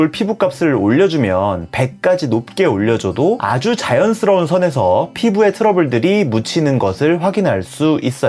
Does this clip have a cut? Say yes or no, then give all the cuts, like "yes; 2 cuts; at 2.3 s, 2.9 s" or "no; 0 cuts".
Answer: no; 0 cuts